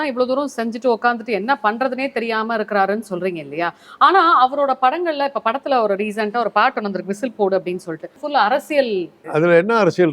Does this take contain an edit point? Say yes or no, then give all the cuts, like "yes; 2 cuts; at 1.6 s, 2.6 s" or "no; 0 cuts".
yes; 2 cuts; at 8.2 s, 9.2 s